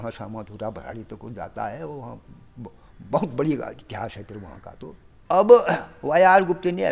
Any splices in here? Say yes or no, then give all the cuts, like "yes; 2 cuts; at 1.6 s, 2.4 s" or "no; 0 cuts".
yes; 1 cut; at 5.1 s